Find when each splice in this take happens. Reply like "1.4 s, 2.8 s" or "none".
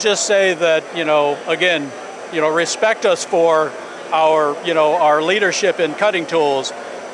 none